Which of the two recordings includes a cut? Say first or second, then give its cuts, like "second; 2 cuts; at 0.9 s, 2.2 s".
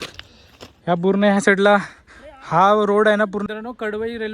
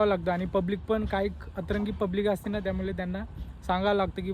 first; 1 cut; at 3.4 s